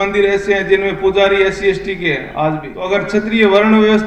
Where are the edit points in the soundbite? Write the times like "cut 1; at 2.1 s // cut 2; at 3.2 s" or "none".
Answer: cut 1; at 2.7 s